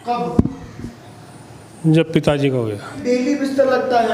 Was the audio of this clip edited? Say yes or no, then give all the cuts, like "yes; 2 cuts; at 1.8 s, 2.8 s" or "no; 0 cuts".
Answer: yes; 1 cut; at 3.0 s